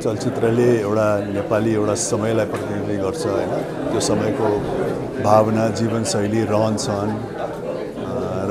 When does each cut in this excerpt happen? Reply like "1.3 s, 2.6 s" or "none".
none